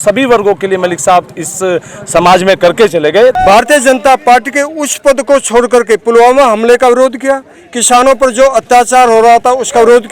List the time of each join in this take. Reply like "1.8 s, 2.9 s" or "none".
3.3 s